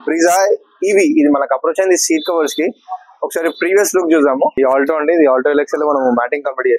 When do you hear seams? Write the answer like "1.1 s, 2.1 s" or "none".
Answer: 4.5 s